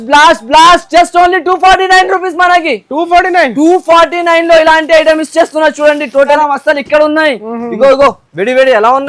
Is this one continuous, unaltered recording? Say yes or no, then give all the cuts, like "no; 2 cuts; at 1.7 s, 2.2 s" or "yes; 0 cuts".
no; 1 cut; at 6.4 s